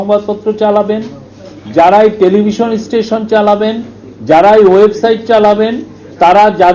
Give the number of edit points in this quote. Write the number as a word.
zero